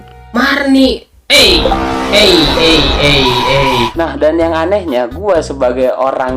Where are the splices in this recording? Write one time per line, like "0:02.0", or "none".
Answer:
0:03.9